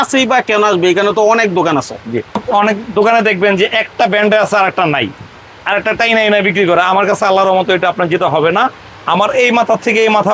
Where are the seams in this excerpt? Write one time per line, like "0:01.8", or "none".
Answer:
0:02.4